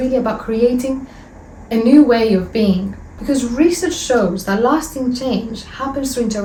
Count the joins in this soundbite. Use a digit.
0